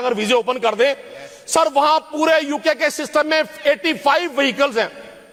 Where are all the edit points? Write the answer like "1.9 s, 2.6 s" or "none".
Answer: none